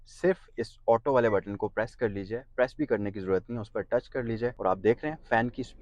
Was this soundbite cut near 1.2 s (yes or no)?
no